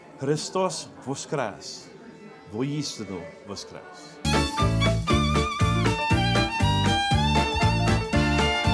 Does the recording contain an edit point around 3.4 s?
yes; 1 cut; at 3.4 s

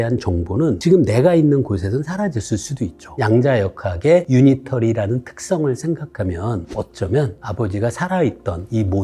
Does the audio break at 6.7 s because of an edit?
yes; 3 cuts; at 3.0 s, 4.3 s, 6.7 s

